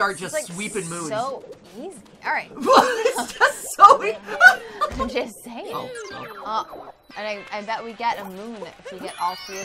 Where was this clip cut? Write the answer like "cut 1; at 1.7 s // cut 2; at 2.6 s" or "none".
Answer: cut 1; at 7.0 s